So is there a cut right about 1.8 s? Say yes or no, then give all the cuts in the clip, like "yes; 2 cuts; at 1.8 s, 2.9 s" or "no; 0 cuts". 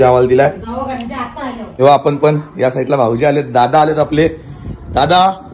yes; 1 cut; at 1.8 s